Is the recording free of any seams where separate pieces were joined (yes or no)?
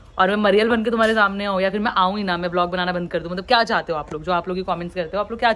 yes